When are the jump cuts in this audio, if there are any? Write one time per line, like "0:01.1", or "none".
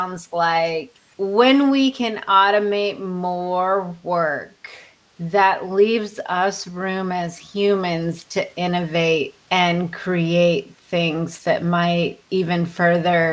0:01.0
0:09.4
0:12.2